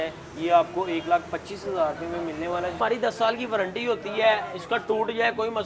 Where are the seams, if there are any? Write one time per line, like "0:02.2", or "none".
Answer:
0:02.8